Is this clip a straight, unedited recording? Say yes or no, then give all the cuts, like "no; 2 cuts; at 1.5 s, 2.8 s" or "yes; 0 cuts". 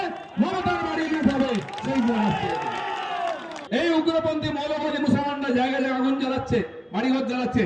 no; 1 cut; at 3.5 s